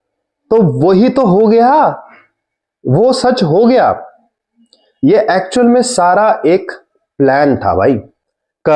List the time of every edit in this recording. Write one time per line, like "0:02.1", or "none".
none